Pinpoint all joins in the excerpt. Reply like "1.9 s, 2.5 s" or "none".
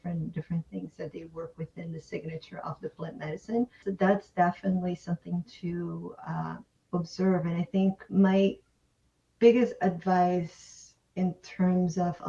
3.9 s, 8.1 s